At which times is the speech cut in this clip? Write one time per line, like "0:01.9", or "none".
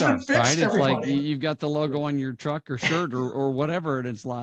none